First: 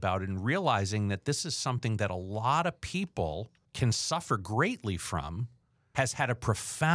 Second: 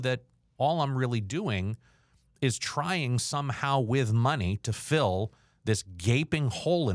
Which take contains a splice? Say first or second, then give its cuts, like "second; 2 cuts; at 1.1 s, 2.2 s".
first; 2 cuts; at 3.6 s, 5.9 s